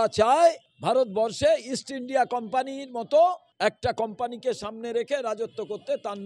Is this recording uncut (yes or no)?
yes